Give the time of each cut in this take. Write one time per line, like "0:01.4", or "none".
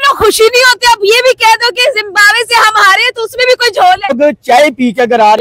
0:04.1